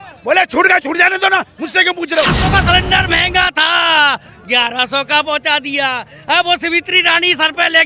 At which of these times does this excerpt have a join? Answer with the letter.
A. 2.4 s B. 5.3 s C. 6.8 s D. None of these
A